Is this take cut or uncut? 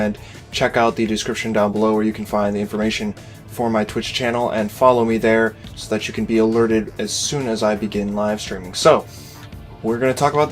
cut